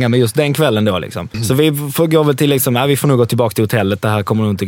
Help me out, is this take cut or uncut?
cut